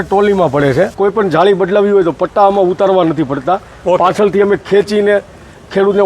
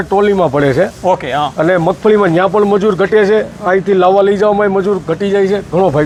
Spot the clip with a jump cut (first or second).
first